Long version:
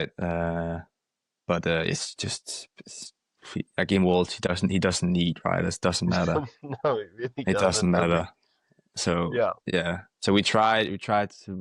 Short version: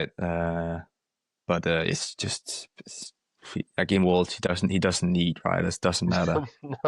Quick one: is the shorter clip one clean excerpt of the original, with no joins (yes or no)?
yes